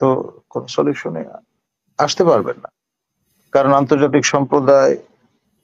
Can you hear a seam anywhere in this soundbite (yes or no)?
no